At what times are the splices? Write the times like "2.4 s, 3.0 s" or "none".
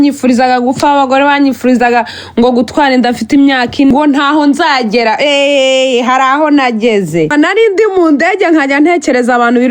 3.9 s, 7.3 s